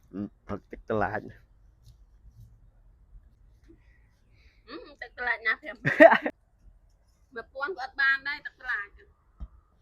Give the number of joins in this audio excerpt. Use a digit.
2